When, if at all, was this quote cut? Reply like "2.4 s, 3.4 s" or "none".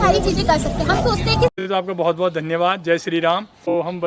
1.5 s